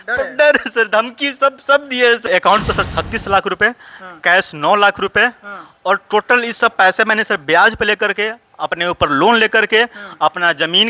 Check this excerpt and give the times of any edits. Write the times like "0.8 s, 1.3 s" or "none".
2.2 s